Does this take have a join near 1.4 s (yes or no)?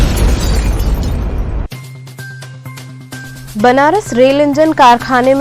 no